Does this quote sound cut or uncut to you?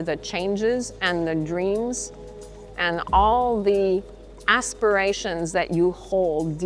uncut